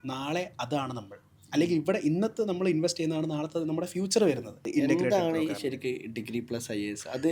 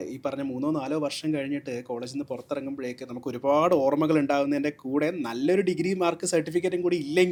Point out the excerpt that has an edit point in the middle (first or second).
first